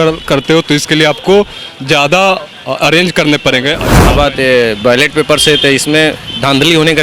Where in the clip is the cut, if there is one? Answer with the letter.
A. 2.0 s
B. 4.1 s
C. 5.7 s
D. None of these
B